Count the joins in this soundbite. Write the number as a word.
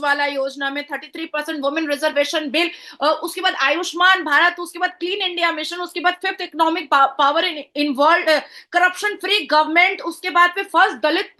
zero